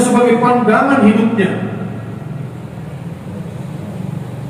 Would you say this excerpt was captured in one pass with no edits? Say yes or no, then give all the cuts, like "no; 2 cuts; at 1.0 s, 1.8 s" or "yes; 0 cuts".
yes; 0 cuts